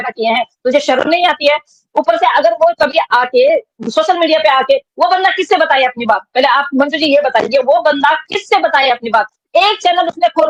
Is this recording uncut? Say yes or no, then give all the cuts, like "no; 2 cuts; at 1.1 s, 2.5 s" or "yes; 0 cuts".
yes; 0 cuts